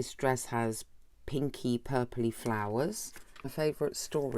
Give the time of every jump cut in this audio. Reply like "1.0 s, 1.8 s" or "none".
3.4 s